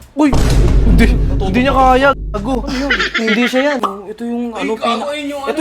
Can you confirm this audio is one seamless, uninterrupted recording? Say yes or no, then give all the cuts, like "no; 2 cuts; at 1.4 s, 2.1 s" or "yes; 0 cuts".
no; 1 cut; at 4.0 s